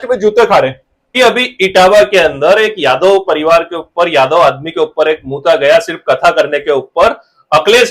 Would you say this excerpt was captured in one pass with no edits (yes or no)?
no